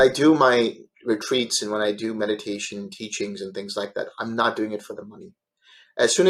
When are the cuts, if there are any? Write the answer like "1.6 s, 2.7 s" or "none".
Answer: none